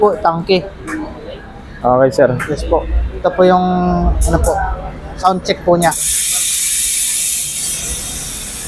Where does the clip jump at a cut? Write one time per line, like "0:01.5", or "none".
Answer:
none